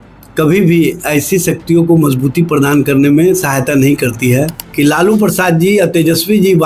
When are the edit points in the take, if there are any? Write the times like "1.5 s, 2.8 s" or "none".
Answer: 4.6 s